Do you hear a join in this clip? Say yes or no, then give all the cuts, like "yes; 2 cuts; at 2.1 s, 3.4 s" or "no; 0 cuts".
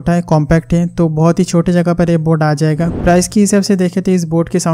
yes; 1 cut; at 3.0 s